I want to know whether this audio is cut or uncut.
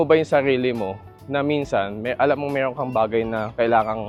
uncut